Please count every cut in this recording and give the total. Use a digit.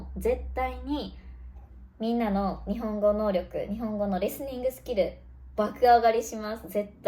0